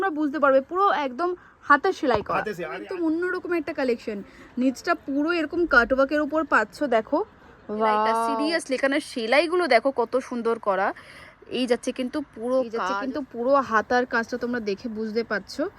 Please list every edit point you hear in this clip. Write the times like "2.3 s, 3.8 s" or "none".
2.8 s, 8.2 s, 12.8 s